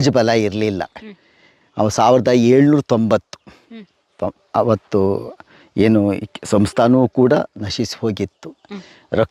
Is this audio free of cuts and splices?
yes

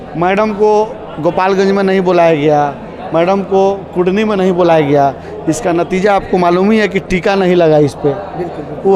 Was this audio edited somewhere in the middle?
no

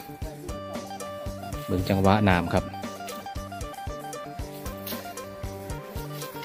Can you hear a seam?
no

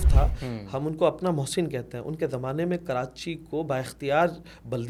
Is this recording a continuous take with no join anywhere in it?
yes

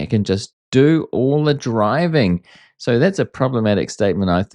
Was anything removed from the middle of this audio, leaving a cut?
no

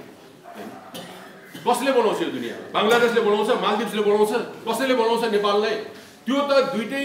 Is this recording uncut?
yes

